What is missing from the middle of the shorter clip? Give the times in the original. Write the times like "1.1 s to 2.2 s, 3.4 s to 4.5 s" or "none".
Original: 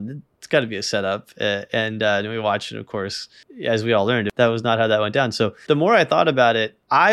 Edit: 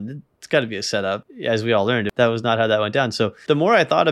1.3 s to 3.5 s